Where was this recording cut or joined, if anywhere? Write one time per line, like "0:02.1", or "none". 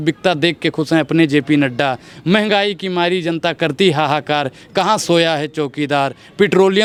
none